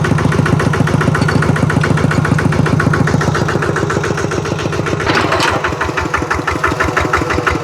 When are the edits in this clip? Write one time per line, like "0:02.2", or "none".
0:05.0